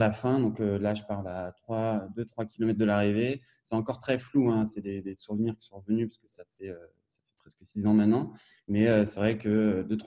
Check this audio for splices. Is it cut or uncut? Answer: uncut